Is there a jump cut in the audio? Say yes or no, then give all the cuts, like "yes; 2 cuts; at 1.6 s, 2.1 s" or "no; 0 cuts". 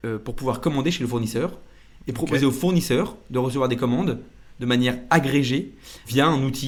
no; 0 cuts